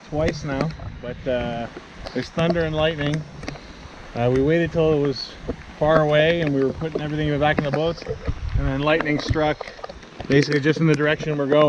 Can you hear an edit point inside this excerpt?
no; 0 cuts

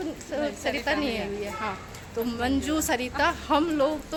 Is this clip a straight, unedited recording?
yes; 0 cuts

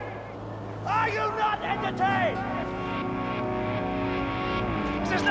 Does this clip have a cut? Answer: no; 0 cuts

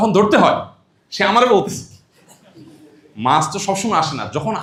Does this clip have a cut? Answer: no; 0 cuts

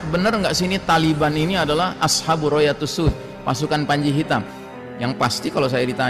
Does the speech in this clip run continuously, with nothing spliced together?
no; 1 cut; at 4.6 s

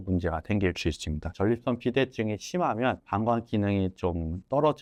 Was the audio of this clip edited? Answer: no; 0 cuts

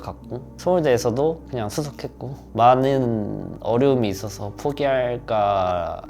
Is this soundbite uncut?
yes; 0 cuts

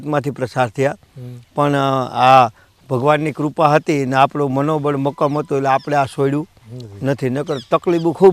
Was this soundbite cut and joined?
no; 0 cuts

